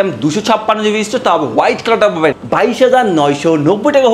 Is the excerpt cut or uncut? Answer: cut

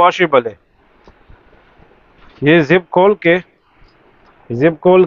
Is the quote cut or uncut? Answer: uncut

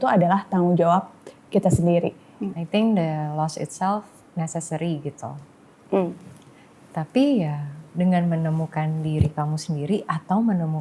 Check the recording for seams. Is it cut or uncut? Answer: cut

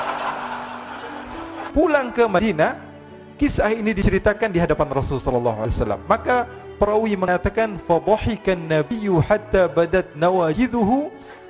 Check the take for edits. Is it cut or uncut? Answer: cut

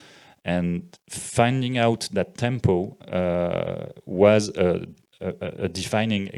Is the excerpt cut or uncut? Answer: uncut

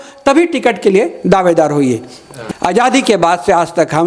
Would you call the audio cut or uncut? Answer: cut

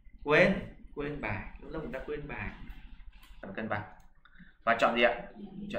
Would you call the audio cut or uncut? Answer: cut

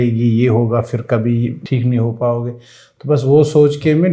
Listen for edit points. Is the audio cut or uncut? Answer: cut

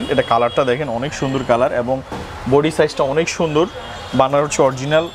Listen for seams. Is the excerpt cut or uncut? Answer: uncut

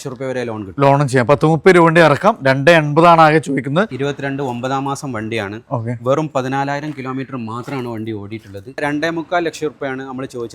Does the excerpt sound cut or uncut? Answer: cut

